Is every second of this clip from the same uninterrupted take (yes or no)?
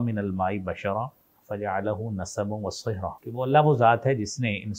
no